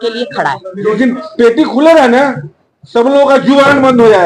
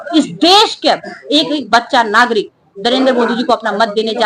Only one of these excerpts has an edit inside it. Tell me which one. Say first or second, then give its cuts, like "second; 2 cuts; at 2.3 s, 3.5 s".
first; 1 cut; at 0.9 s